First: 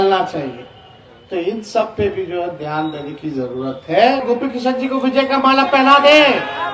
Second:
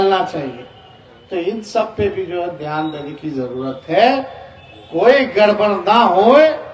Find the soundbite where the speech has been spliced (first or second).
first